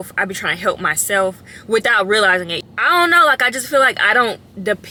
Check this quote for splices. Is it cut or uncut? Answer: uncut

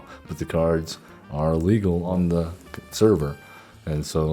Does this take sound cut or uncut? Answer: cut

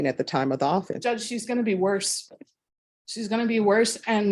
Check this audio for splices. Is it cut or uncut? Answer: cut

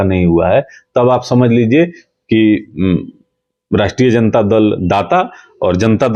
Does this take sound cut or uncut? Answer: uncut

